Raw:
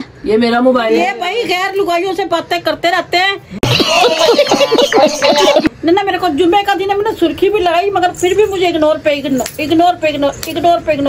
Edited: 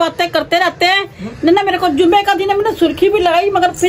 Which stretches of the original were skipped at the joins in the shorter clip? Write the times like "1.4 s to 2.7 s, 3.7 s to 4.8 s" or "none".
3.7 s to 5.8 s